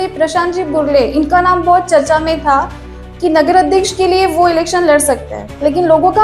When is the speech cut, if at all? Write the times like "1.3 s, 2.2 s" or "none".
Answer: none

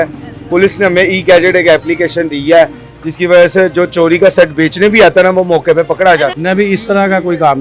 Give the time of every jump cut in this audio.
6.4 s

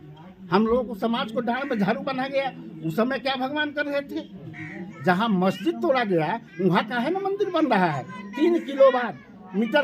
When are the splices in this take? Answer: 4.8 s

